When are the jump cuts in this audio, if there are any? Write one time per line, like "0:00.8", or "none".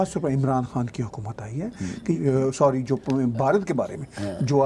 0:02.2